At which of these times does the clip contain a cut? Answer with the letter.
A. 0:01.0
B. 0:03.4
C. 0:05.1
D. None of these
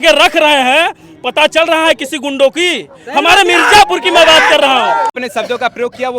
C